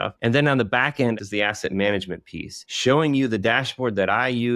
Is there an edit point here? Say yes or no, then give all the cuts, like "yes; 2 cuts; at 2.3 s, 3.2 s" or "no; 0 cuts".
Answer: yes; 1 cut; at 1.2 s